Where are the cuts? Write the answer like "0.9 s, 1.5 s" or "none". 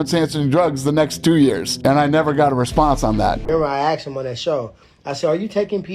3.4 s

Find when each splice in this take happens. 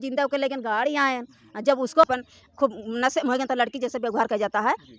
2.0 s

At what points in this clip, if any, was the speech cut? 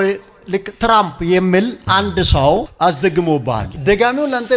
2.7 s

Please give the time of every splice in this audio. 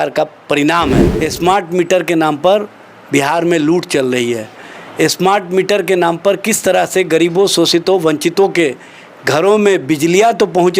1.0 s

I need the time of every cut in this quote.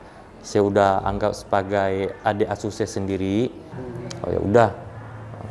3.7 s

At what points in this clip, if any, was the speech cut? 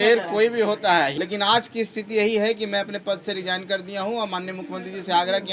1.1 s

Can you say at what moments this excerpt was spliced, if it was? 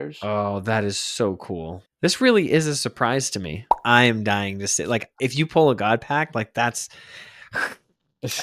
1.8 s, 3.8 s

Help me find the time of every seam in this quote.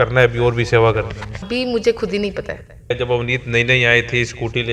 1.5 s, 2.9 s

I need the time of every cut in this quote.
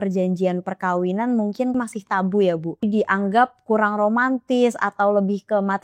1.7 s, 2.8 s

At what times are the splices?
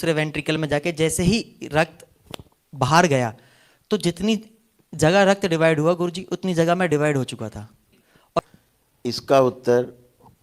8.4 s

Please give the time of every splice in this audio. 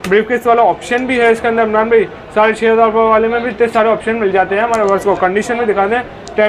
none

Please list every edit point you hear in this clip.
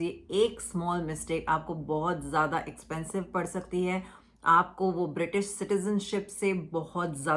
none

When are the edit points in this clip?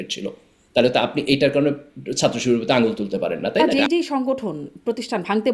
3.7 s

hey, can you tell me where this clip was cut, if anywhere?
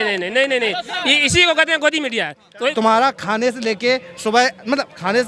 2.7 s

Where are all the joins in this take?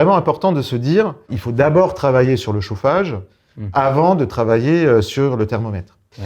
1.4 s

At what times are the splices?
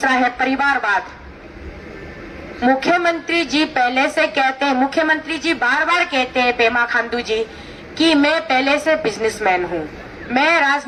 none

